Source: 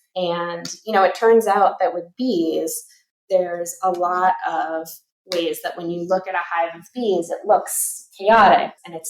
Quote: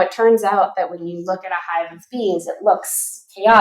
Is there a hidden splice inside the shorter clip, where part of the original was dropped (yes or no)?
yes